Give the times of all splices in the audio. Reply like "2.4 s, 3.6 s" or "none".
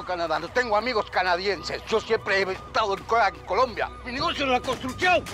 4.0 s